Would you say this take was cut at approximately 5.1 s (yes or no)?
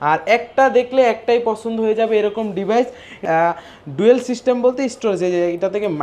no